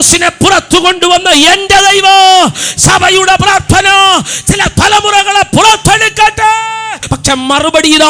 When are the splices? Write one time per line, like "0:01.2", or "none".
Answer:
0:07.1